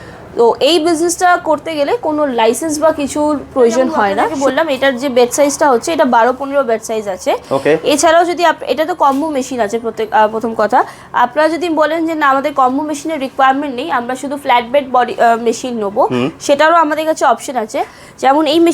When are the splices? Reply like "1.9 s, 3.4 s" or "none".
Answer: 4.3 s